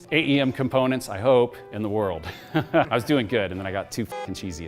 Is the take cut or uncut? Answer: cut